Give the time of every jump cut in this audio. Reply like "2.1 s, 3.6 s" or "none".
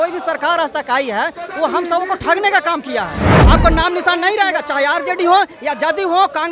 3.3 s